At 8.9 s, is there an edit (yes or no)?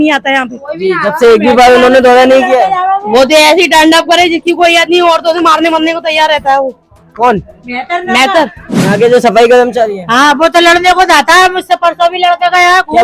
yes